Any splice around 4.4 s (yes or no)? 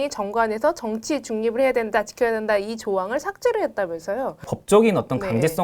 yes